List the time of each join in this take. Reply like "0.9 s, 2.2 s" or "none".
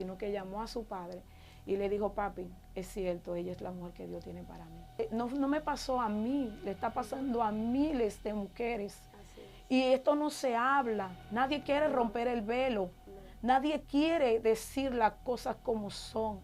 5.0 s